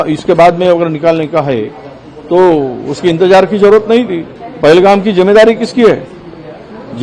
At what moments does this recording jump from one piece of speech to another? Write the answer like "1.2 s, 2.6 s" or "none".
4.4 s

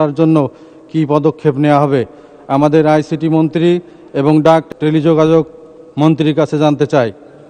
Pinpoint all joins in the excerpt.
4.7 s

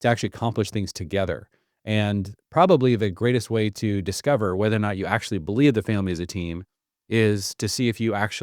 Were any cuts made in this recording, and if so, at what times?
none

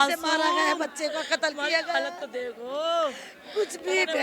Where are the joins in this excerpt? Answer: none

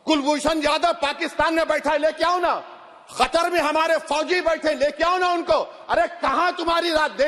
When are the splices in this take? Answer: none

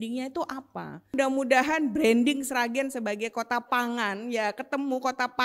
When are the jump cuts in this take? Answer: 1.1 s

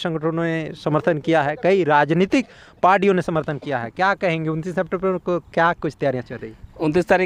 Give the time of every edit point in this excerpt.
none

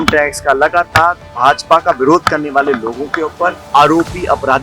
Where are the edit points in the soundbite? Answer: 1.3 s, 3.6 s

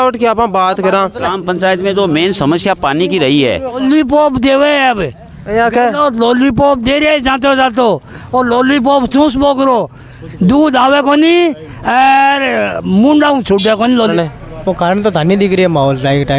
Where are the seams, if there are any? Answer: 1.3 s, 3.8 s, 14.1 s

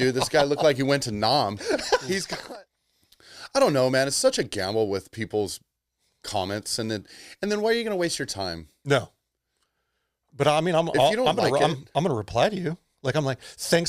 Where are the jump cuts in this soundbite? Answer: 2.4 s

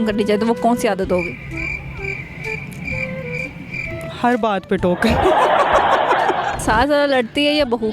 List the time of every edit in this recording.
6.6 s

